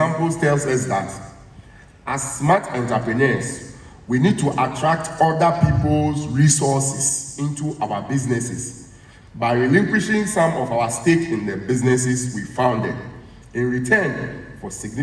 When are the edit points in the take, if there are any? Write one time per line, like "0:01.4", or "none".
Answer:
none